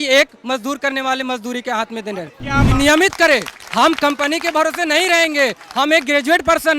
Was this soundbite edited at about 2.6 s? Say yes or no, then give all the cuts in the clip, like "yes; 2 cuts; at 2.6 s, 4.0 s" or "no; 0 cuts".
yes; 1 cut; at 2.6 s